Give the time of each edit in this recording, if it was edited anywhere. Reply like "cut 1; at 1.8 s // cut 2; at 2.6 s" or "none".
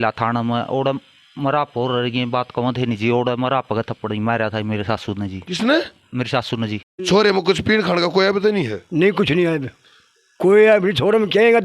cut 1; at 7.0 s